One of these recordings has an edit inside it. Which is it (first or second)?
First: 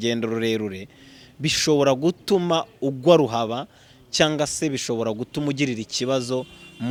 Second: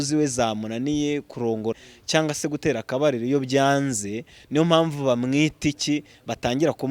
second